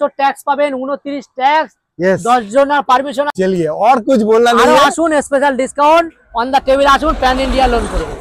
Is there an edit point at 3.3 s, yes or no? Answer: yes